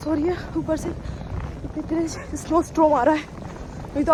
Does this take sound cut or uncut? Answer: uncut